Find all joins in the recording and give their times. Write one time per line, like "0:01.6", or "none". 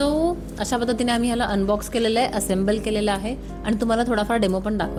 none